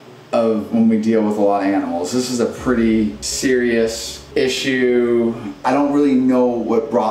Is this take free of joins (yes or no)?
no